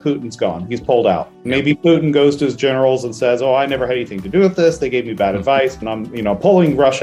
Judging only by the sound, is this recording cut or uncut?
cut